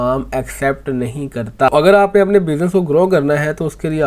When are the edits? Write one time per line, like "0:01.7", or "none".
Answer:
0:01.7